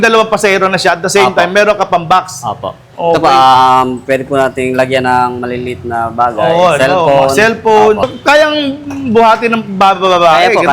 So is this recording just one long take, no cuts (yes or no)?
no